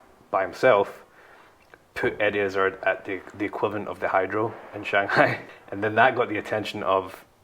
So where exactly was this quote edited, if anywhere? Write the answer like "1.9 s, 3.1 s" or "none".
5.4 s